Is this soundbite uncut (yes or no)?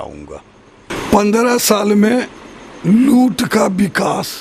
no